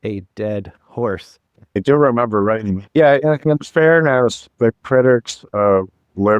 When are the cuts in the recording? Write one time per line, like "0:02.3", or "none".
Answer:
0:01.8
0:02.8
0:04.4